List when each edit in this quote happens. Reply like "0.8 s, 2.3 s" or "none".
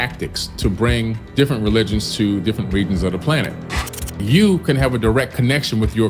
1.2 s, 4.2 s